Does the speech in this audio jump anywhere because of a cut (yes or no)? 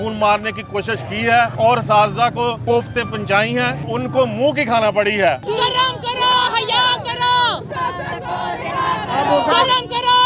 yes